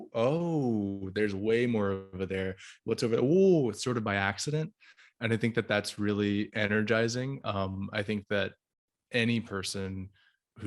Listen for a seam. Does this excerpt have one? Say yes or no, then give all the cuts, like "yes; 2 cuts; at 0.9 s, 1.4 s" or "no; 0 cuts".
no; 0 cuts